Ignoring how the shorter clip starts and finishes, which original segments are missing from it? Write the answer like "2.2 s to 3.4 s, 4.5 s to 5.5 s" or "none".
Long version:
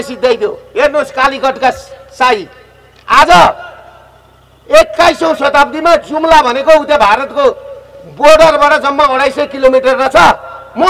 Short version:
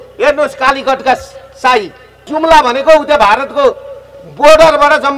2.9 s to 6.1 s

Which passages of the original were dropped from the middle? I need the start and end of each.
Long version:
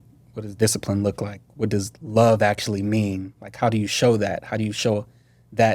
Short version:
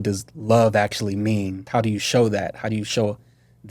3.2 s to 3.5 s

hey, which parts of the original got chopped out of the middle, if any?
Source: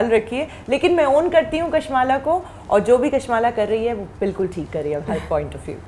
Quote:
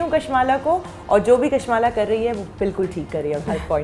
none

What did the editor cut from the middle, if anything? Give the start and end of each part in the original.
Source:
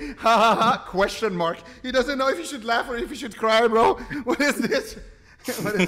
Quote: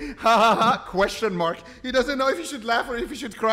none

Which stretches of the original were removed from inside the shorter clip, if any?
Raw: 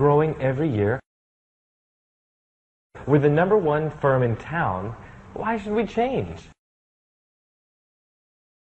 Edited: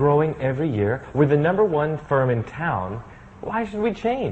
1.0 s to 3.0 s

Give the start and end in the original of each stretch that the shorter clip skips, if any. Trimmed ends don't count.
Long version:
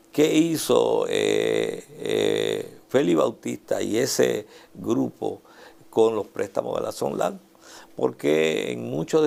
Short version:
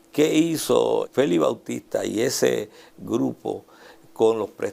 1.1 s to 2.8 s

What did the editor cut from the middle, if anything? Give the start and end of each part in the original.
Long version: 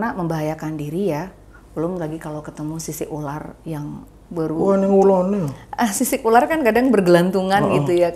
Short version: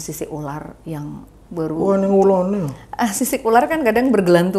none

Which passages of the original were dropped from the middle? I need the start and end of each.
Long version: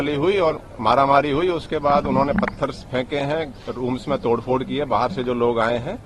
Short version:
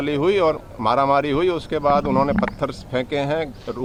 none

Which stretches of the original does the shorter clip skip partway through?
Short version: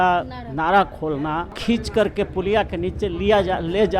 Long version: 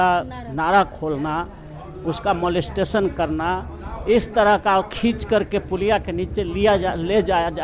1.6 s to 4.9 s

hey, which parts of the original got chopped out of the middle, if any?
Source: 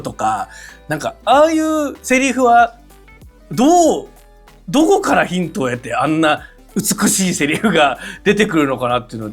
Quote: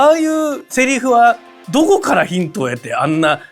2.9 s to 4.5 s

